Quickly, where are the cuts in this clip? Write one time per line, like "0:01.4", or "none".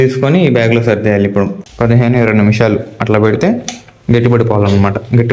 0:01.6